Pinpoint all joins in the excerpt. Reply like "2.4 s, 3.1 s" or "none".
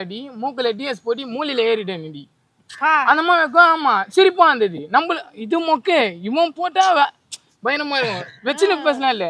none